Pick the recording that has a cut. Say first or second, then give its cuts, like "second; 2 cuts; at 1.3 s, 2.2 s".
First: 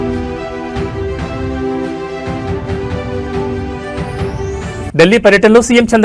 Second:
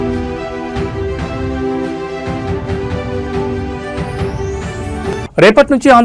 second; 1 cut; at 4.9 s